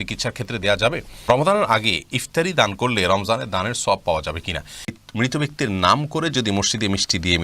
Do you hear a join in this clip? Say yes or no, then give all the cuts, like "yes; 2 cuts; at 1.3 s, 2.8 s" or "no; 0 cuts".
yes; 2 cuts; at 1.3 s, 4.9 s